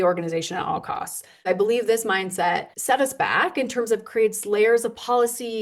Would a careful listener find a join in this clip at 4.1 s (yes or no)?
no